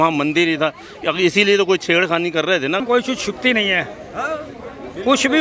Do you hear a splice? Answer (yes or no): yes